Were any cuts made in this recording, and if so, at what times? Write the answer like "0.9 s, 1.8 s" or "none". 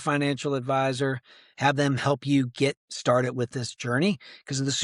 none